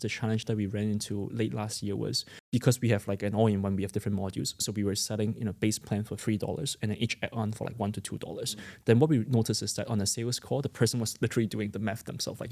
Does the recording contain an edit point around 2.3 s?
yes; 1 cut; at 2.3 s

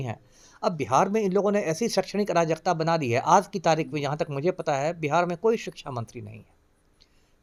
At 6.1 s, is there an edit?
no; 0 cuts

